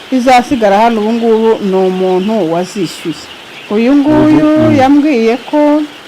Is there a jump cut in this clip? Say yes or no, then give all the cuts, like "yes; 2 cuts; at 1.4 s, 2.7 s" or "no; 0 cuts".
yes; 1 cut; at 3.2 s